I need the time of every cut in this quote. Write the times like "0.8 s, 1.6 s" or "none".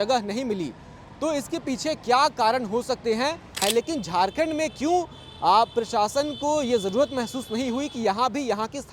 3.6 s